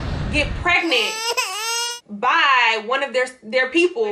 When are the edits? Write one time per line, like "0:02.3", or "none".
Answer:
none